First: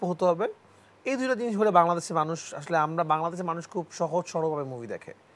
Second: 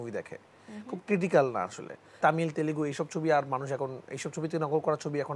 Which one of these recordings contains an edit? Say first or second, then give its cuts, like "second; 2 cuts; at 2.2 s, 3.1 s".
second; 1 cut; at 2.2 s